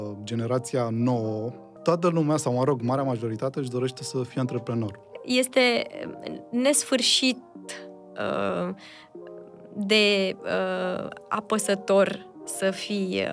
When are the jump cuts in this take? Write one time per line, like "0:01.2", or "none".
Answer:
0:01.7
0:05.1